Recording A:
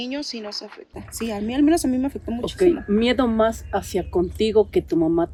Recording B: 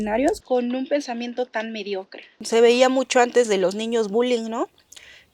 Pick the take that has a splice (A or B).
B